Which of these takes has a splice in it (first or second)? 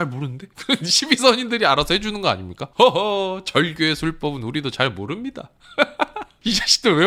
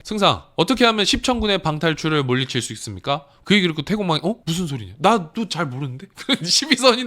second